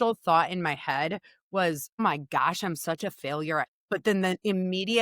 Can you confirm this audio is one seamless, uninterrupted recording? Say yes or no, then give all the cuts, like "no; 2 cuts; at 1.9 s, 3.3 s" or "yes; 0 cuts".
no; 2 cuts; at 2.0 s, 3.8 s